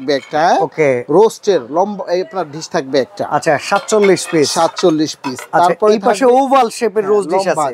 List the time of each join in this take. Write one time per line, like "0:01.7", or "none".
none